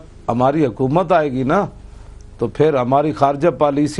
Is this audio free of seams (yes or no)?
yes